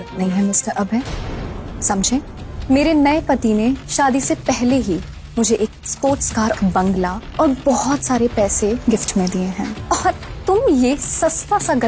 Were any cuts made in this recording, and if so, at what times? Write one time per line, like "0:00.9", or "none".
none